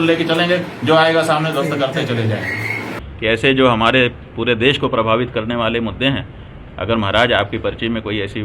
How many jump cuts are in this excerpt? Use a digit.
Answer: 1